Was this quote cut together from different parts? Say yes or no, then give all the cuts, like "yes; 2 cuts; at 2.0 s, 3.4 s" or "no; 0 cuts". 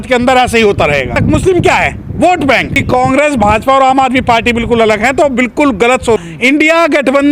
yes; 3 cuts; at 1.2 s, 2.8 s, 6.2 s